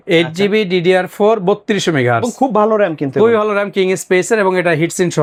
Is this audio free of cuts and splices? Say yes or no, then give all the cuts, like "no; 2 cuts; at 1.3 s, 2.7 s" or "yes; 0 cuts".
yes; 0 cuts